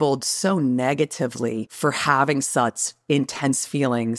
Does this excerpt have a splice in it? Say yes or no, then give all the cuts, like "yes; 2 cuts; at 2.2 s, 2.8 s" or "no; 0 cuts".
yes; 1 cut; at 1.7 s